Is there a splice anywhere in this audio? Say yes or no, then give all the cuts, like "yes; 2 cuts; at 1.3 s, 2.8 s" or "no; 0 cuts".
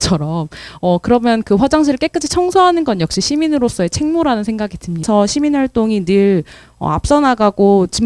yes; 1 cut; at 5.0 s